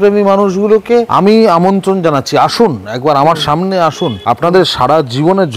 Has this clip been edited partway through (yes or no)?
yes